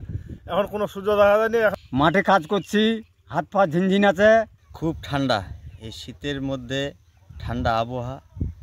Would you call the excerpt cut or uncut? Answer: cut